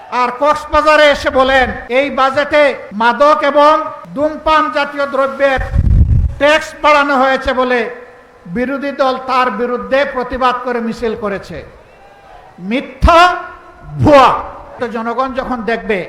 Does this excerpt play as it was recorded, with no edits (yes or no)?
no